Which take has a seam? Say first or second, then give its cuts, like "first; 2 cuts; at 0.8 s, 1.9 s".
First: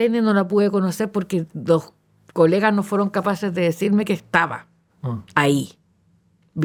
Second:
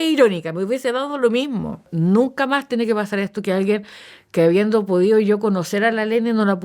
second; 1 cut; at 1.8 s